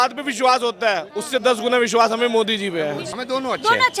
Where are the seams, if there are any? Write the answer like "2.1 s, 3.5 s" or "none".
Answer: 3.0 s